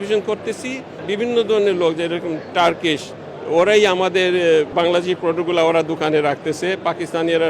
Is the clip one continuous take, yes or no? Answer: no